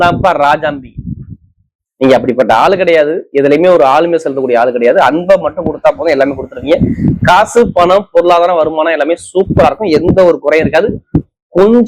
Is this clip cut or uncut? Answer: uncut